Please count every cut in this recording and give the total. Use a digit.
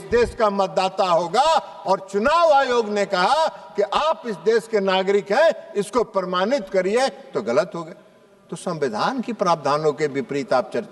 0